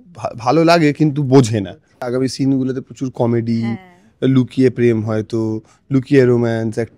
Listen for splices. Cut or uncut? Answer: cut